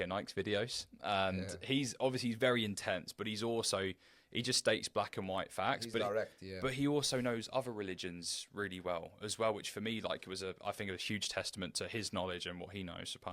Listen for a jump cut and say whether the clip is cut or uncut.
uncut